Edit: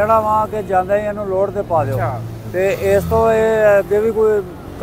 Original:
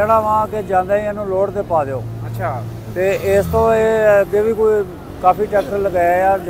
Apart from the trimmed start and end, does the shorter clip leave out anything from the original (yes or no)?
yes